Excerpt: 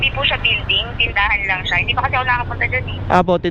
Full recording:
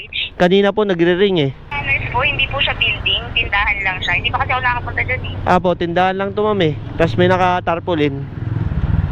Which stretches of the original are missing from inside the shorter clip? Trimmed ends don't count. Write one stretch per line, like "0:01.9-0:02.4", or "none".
none